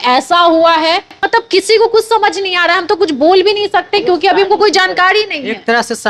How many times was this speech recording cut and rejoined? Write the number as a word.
one